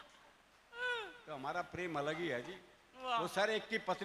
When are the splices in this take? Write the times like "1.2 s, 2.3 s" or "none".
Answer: none